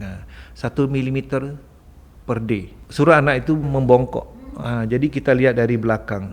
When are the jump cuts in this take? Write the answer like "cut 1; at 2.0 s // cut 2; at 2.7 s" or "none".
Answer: cut 1; at 2.8 s // cut 2; at 3.7 s